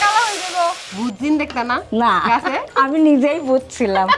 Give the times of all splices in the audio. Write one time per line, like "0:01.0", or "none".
0:00.9
0:02.7

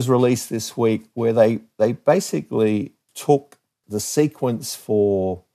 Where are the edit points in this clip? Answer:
0:03.0
0:03.7

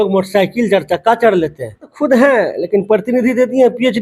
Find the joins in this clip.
0:01.9

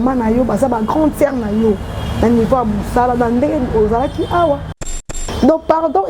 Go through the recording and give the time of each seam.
0:04.9

